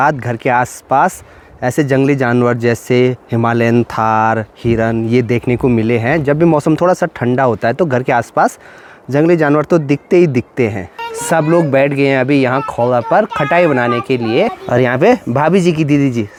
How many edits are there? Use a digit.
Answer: 0